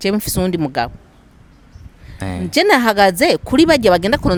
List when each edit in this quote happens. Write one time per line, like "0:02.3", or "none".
none